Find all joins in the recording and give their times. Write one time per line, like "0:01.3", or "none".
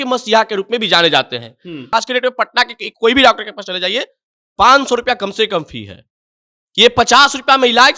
0:01.9